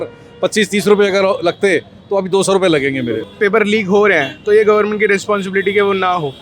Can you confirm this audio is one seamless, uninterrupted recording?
no; 1 cut; at 3.2 s

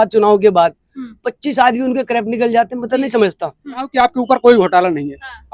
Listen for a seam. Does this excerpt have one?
yes; 1 cut; at 3.9 s

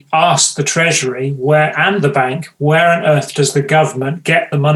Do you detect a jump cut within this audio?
no; 0 cuts

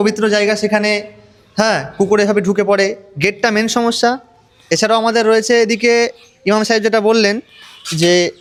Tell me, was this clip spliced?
no; 0 cuts

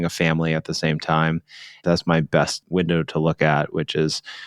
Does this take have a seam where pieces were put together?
yes; 1 cut; at 2.7 s

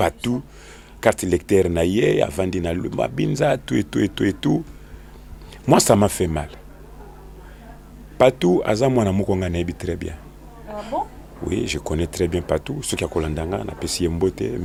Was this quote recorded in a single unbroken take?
yes; 0 cuts

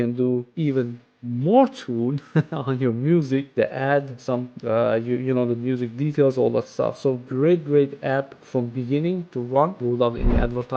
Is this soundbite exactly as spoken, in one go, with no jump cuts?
yes; 0 cuts

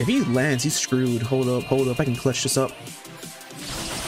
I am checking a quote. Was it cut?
no; 0 cuts

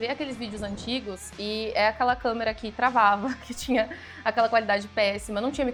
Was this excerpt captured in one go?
yes; 0 cuts

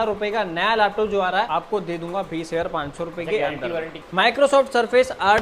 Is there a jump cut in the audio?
yes; 2 cuts; at 1.5 s, 4.0 s

